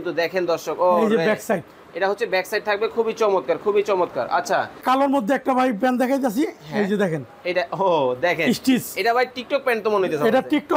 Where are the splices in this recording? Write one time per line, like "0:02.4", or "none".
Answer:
0:04.8